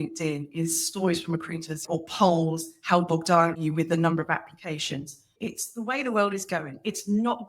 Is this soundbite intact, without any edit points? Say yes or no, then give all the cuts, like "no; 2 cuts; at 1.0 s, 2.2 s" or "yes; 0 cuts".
no; 3 cuts; at 1.8 s, 3.6 s, 5.3 s